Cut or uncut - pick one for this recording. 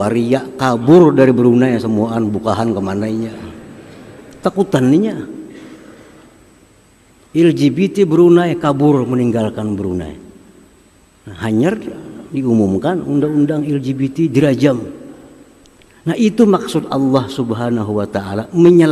uncut